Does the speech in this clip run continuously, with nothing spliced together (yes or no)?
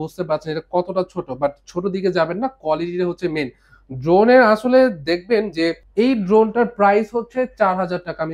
no